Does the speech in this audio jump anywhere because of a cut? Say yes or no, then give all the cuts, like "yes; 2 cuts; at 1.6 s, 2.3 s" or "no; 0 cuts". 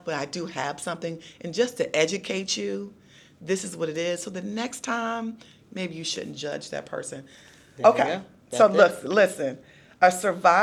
no; 0 cuts